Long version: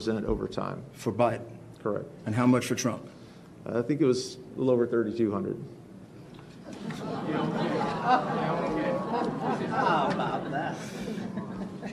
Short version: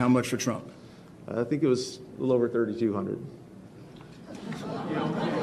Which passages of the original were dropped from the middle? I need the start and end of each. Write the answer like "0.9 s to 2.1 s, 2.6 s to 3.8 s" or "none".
none